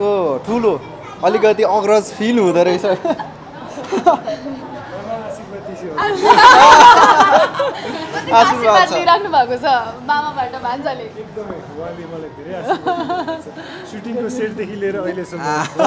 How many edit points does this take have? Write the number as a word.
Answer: zero